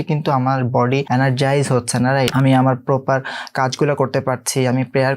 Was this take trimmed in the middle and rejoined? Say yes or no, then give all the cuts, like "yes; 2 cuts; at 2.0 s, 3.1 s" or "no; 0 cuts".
yes; 2 cuts; at 1.0 s, 2.3 s